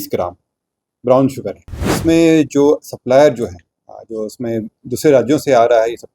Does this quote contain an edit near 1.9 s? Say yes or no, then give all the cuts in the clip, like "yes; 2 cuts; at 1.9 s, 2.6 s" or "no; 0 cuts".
yes; 1 cut; at 1.9 s